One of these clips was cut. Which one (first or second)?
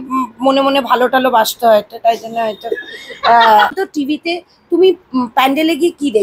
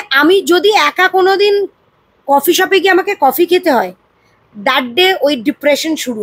first